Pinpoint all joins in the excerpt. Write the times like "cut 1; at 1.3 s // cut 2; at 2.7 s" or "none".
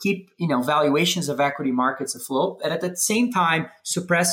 none